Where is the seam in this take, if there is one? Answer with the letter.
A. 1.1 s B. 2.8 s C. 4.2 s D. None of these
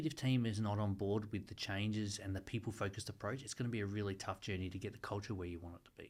D